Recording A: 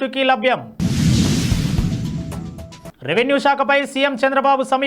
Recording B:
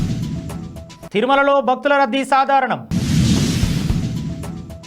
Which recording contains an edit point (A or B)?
B